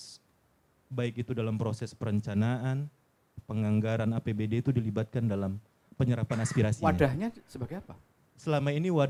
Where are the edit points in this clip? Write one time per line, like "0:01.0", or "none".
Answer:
none

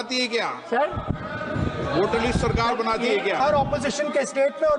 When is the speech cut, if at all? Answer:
0:03.4

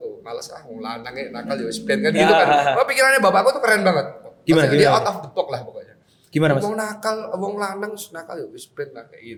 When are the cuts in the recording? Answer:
none

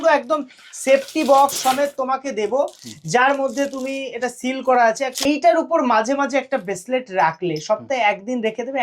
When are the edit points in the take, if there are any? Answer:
0:05.2

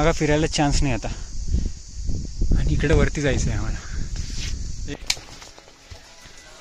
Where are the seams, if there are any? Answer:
0:04.9

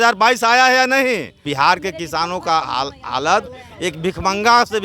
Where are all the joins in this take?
0:01.5

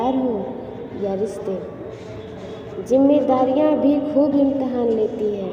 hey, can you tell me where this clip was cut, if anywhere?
none

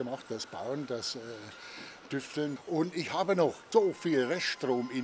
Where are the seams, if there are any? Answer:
0:02.5
0:03.6

